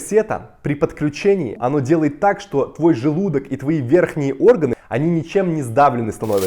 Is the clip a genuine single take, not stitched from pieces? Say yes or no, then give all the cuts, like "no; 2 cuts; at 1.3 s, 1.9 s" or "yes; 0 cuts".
no; 2 cuts; at 1.6 s, 4.8 s